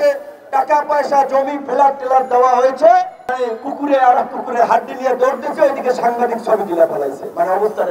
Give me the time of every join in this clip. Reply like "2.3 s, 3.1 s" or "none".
3.2 s